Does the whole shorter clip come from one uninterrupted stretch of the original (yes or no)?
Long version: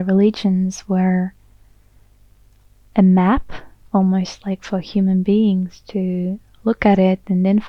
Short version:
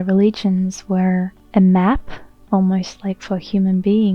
no